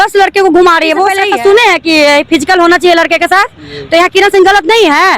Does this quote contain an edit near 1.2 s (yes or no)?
yes